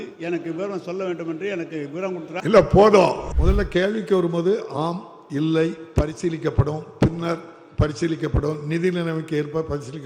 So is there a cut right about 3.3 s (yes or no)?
yes